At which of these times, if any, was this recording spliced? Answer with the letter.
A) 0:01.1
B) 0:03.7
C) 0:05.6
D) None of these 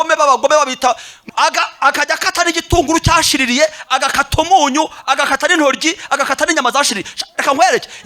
A